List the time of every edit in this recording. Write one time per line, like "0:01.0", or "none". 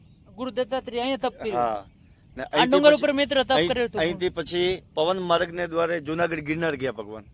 none